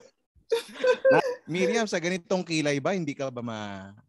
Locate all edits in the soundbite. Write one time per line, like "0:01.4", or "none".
0:01.2